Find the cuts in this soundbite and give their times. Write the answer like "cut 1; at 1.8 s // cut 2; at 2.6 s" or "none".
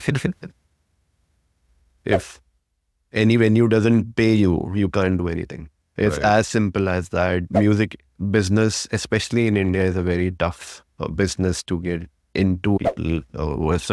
cut 1; at 1.9 s // cut 2; at 7.5 s // cut 3; at 12.8 s